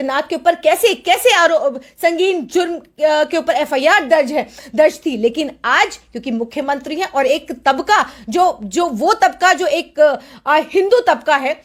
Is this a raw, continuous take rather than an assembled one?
yes; 0 cuts

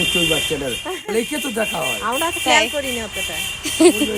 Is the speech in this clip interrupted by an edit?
no; 0 cuts

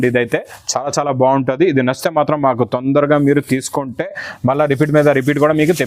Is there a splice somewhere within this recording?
no; 0 cuts

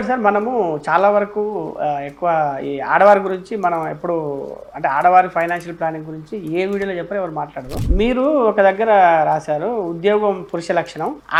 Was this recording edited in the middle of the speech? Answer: no; 0 cuts

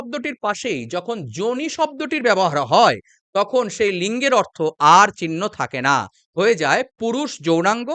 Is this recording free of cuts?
yes; 0 cuts

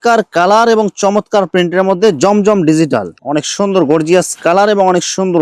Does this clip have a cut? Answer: yes; 1 cut; at 3.1 s

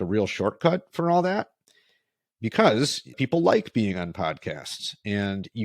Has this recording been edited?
yes; 1 cut; at 3.1 s

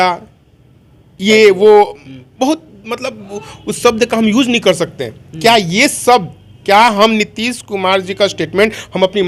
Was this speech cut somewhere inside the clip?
no; 0 cuts

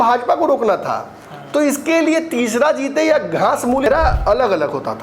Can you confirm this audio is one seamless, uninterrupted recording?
no; 1 cut; at 3.9 s

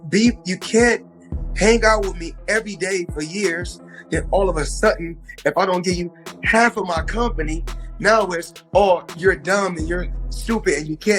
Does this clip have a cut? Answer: no; 0 cuts

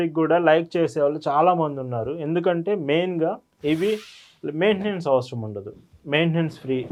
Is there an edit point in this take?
no; 0 cuts

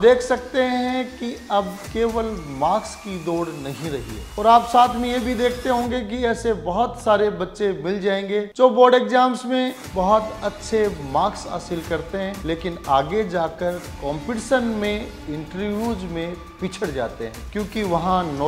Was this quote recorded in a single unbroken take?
no; 5 cuts; at 1.8 s, 4.2 s, 8.5 s, 12.4 s, 17.4 s

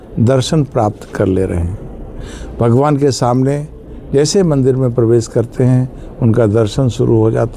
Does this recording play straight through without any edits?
yes; 0 cuts

